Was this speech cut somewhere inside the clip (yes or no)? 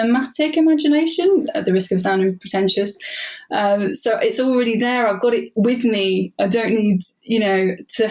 no